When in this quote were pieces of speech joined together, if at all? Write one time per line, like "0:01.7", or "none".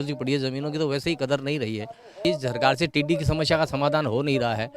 0:02.2